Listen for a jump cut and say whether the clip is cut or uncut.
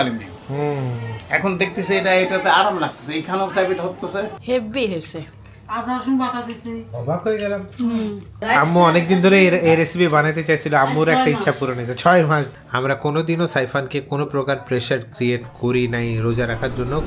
cut